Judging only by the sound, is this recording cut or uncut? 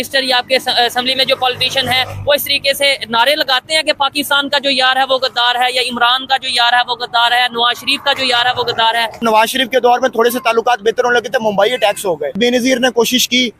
cut